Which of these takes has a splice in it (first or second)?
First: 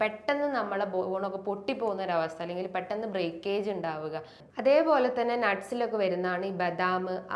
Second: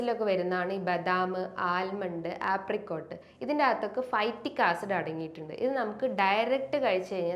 first